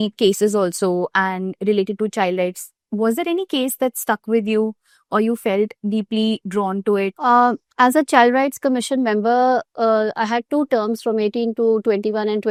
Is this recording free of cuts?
yes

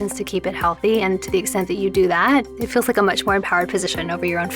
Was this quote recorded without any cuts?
no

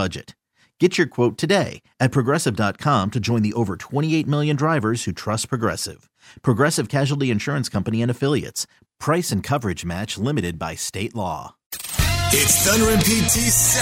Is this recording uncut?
no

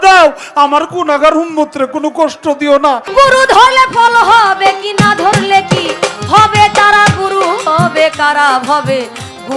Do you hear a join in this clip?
yes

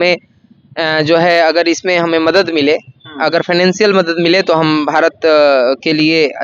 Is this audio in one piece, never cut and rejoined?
yes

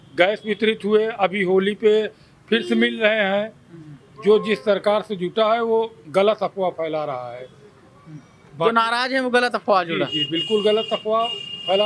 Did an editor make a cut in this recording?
no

